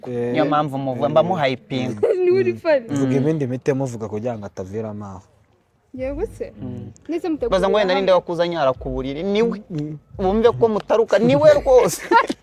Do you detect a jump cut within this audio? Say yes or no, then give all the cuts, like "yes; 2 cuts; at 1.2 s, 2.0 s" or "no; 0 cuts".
no; 0 cuts